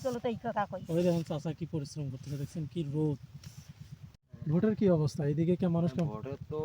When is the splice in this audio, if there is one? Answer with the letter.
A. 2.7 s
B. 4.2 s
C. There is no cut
B